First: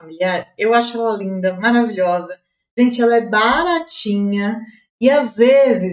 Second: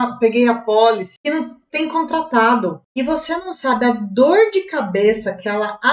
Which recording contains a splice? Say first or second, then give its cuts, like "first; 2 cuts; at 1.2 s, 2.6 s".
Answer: second; 2 cuts; at 1.1 s, 2.8 s